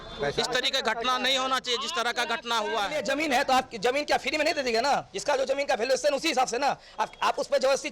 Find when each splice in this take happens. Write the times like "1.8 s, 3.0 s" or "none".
3.0 s